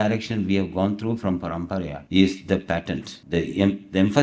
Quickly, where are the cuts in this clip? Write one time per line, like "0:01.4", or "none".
0:02.0
0:03.1

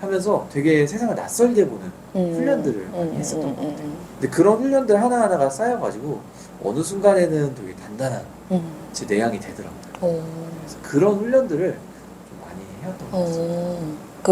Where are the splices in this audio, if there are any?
none

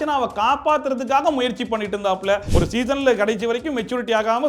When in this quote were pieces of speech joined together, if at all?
0:02.5

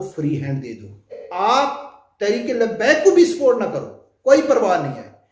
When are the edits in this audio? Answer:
0:01.2

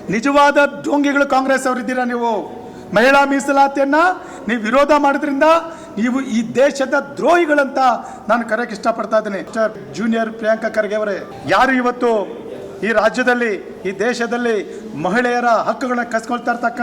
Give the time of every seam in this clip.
0:09.7
0:11.3

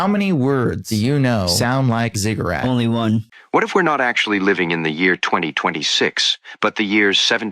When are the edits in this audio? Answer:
0:03.2

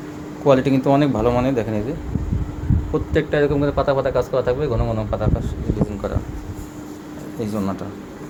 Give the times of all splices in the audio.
none

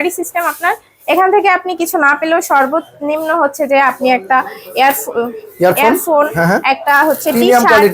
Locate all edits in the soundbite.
none

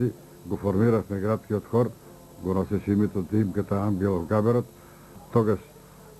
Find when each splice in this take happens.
0:05.2

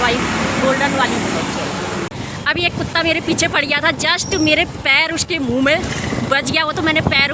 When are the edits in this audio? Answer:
0:02.1

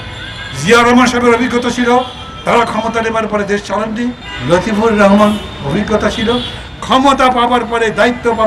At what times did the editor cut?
0:04.3

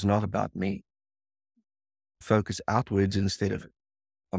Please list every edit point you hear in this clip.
0:02.2

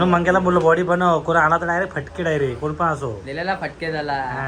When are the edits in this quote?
none

